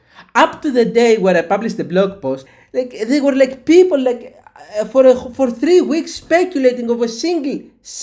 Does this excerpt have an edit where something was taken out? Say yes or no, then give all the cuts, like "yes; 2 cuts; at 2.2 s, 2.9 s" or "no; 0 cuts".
yes; 1 cut; at 2.5 s